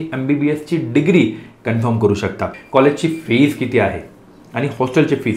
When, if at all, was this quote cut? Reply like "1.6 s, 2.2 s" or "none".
2.6 s